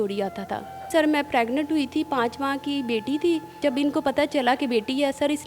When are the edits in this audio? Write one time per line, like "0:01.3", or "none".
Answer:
0:00.9
0:03.6